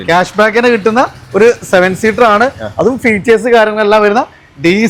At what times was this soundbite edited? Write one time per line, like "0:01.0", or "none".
none